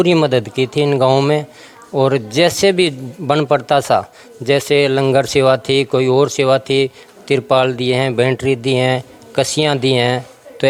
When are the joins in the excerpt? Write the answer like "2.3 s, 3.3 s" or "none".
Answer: none